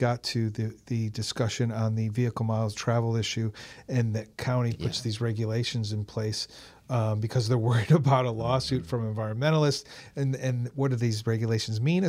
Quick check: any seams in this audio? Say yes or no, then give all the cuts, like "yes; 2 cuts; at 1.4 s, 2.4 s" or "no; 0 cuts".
no; 0 cuts